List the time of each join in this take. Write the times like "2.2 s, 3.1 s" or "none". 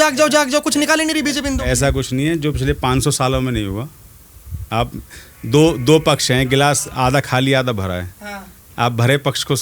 none